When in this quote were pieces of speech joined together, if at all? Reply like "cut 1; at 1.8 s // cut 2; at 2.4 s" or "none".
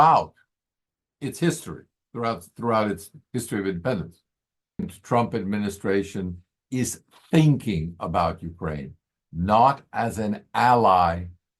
cut 1; at 4.9 s